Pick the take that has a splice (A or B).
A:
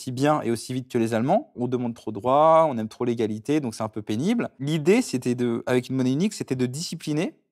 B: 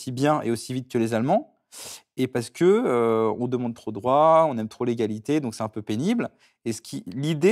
A